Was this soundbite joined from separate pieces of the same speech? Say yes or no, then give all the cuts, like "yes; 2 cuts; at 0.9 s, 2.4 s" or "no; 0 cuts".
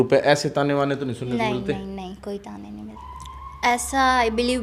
yes; 1 cut; at 2.9 s